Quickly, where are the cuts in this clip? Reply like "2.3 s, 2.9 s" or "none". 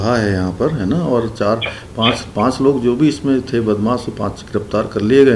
none